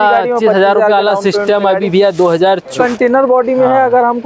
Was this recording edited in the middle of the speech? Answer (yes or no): yes